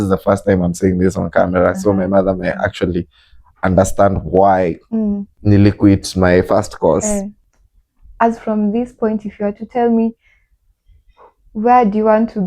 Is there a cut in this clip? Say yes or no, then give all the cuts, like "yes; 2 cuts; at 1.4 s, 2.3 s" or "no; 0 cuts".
yes; 2 cuts; at 5.3 s, 7.4 s